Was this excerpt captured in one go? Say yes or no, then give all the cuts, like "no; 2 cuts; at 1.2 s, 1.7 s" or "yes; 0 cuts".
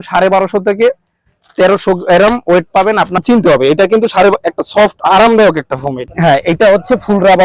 no; 2 cuts; at 3.2 s, 6.1 s